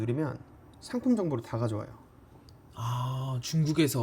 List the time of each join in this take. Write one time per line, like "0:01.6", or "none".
none